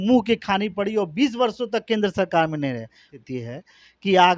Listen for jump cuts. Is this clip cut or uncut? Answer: cut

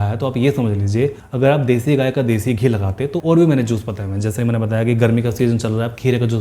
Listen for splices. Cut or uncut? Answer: cut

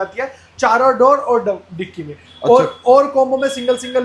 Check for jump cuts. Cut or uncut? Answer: uncut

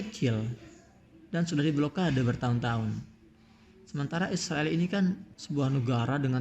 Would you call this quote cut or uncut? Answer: cut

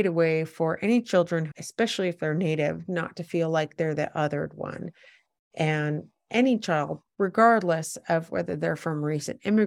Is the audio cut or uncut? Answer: cut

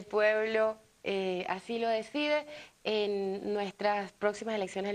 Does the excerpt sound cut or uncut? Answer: cut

